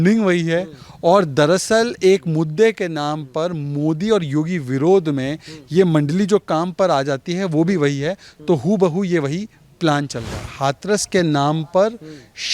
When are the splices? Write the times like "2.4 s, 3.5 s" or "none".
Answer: 10.4 s